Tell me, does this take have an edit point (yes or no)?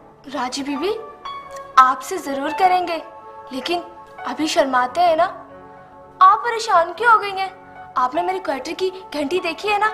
no